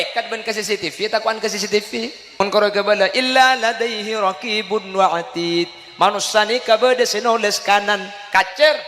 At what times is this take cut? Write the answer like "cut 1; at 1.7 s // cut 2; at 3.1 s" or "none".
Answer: cut 1; at 2.4 s